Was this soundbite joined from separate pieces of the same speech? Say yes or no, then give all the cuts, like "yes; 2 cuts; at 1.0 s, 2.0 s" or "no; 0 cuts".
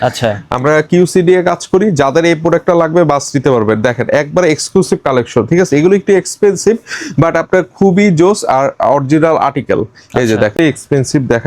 yes; 1 cut; at 10.5 s